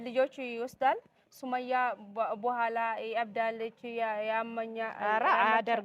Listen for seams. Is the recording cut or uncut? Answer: uncut